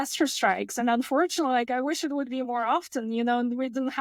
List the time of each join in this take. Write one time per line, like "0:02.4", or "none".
none